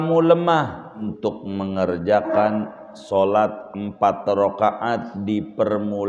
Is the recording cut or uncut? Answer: cut